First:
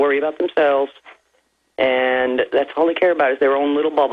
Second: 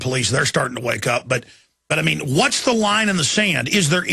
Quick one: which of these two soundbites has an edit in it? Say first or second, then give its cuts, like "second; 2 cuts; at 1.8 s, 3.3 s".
first; 1 cut; at 1.6 s